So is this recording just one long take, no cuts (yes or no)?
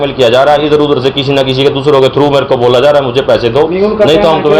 yes